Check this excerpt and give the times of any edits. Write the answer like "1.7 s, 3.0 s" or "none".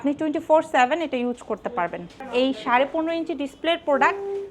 2.2 s